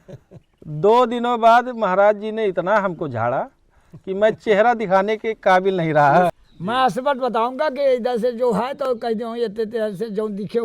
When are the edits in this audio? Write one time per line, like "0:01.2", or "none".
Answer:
0:06.5